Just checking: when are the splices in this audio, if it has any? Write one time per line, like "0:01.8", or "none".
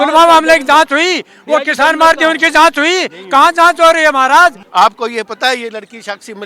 0:04.6